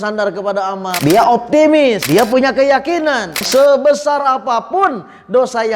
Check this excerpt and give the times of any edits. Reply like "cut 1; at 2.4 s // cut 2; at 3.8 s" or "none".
cut 1; at 0.9 s // cut 2; at 2.0 s // cut 3; at 3.4 s

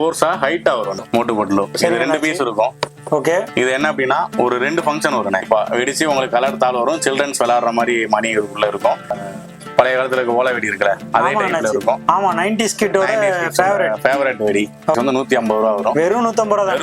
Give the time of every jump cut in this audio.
cut 1; at 1.0 s // cut 2; at 5.4 s // cut 3; at 9.1 s // cut 4; at 15.0 s

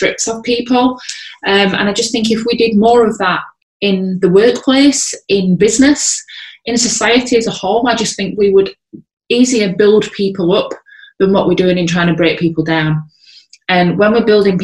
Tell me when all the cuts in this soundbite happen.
none

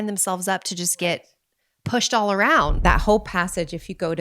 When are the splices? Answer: cut 1; at 2.8 s

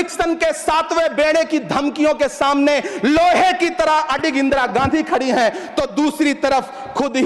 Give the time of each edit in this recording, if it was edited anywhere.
none

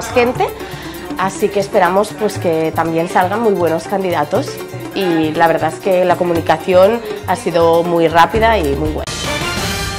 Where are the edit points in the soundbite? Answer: cut 1; at 9.1 s

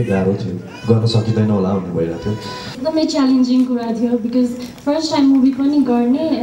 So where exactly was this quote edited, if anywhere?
cut 1; at 2.8 s

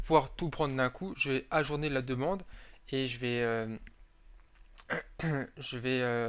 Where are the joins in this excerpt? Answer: cut 1; at 5.3 s

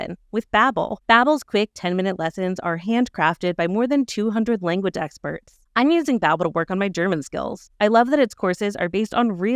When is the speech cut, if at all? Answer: cut 1; at 1.0 s // cut 2; at 5.5 s

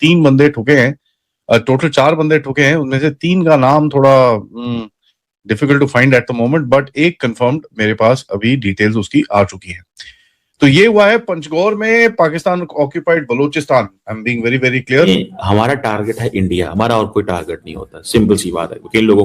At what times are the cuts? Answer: cut 1; at 15.1 s

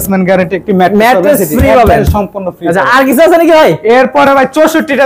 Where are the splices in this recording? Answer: none

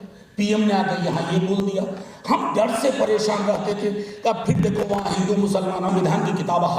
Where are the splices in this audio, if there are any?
cut 1; at 5.9 s

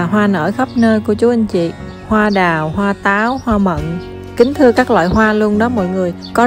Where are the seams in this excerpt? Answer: none

